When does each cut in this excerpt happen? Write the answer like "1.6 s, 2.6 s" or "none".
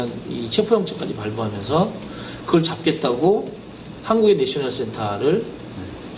3.5 s